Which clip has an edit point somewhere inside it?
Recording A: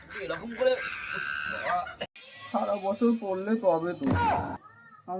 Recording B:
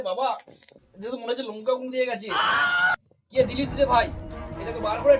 A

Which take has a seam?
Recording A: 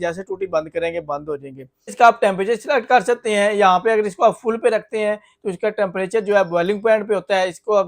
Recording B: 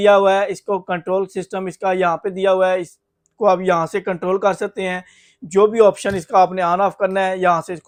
A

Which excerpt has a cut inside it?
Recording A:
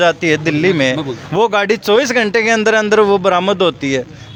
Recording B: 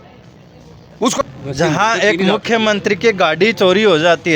B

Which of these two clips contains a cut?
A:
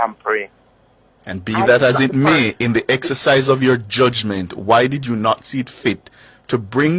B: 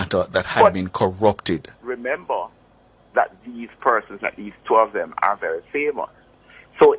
B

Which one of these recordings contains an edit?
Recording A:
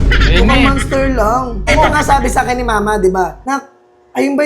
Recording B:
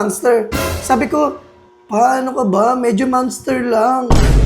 A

